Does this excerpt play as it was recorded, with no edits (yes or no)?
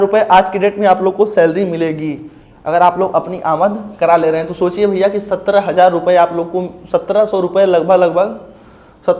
yes